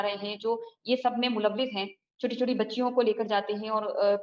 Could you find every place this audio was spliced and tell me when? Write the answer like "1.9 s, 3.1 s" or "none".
none